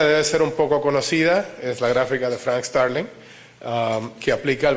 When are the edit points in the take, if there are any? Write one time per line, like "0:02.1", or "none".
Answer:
0:01.6

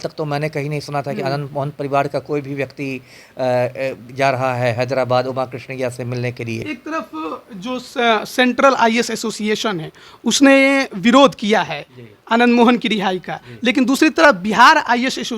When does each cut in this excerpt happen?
0:06.6

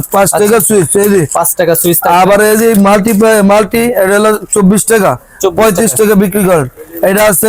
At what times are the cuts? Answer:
none

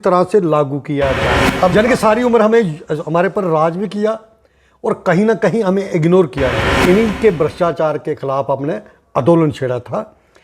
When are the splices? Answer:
0:01.4
0:06.8

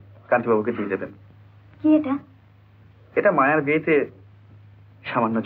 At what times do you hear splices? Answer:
none

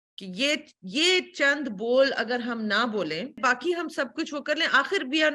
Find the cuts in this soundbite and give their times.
0:03.4

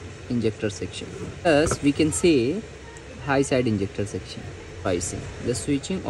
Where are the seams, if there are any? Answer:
0:01.5
0:04.9

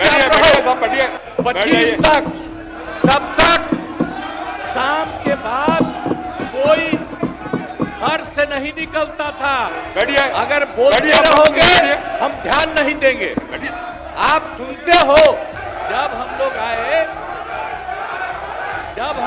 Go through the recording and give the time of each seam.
0:01.2
0:09.8
0:15.6

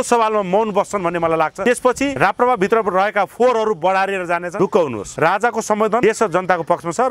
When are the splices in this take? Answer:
0:01.9
0:04.5
0:05.0
0:06.0

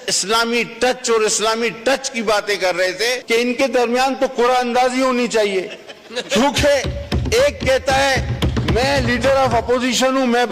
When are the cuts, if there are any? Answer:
0:03.2

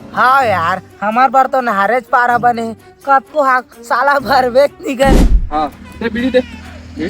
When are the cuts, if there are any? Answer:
0:05.4

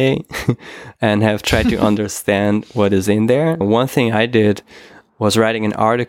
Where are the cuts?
0:03.6

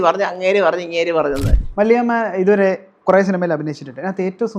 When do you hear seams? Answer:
0:01.6

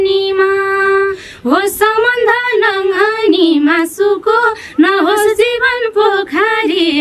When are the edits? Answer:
none

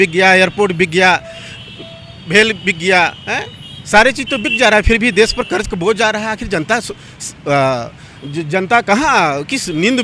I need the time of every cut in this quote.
none

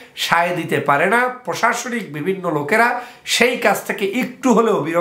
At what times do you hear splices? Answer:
none

